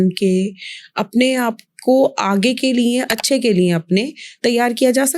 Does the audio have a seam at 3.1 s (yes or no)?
yes